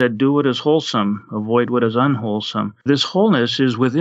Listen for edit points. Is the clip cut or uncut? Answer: cut